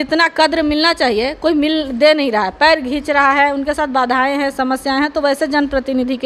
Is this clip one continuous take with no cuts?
yes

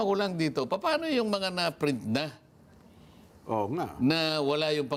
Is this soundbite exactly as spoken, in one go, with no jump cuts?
yes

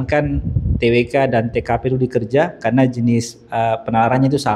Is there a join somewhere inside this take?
no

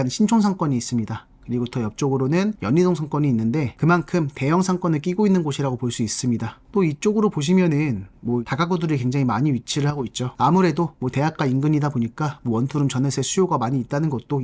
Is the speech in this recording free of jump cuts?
yes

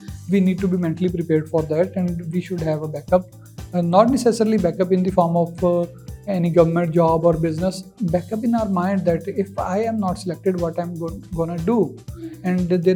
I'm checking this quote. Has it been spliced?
no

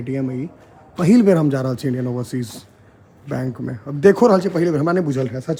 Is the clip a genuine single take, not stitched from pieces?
yes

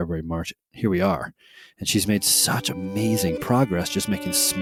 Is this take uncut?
yes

